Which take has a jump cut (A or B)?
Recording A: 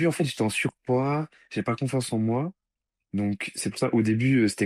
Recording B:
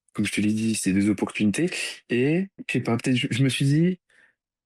B